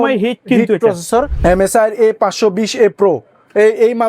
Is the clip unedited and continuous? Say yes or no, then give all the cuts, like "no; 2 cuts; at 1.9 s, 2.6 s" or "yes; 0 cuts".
no; 1 cut; at 1.3 s